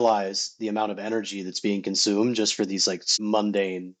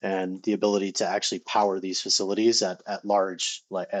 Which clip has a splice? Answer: first; 1 cut; at 3.1 s

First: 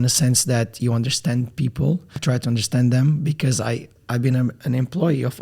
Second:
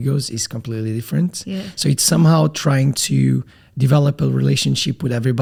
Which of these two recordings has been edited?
first; 2 cuts; at 2.2 s, 4.0 s

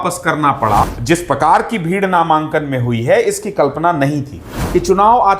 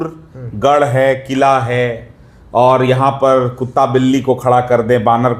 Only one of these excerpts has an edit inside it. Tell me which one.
first; 2 cuts; at 1.0 s, 4.6 s

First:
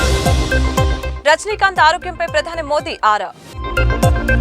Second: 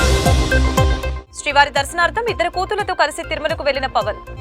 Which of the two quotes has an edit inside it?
second; 1 cut; at 1.1 s

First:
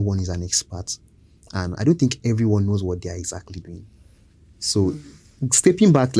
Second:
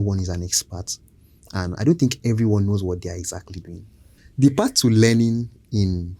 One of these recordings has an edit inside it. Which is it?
second; 1 cut; at 4.2 s

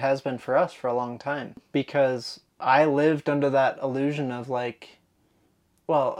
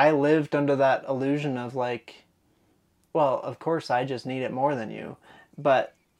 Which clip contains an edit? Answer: first; 1 cut; at 1.6 s

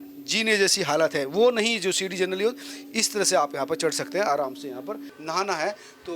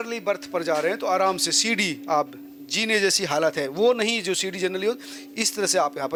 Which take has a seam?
first; 1 cut; at 5.1 s

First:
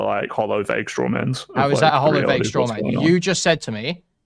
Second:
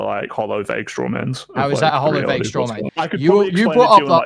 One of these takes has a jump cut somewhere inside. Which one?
second; 1 cut; at 2.8 s

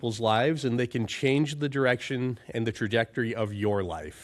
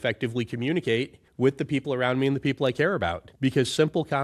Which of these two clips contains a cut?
second; 2 cuts; at 1.2 s, 3.2 s

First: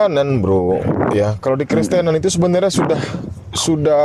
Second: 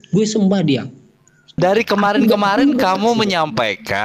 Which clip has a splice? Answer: second; 1 cut; at 1.5 s

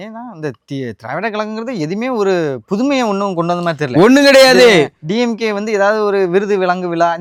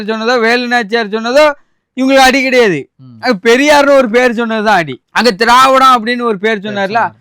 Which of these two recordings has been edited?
second; 1 cut; at 5.0 s

